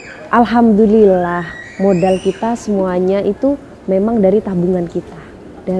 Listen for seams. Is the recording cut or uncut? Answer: uncut